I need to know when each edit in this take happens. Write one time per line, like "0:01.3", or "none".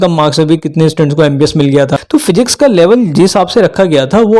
0:02.0